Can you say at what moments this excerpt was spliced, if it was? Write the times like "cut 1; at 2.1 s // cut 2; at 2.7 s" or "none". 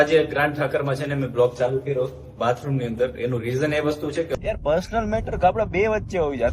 cut 1; at 4.3 s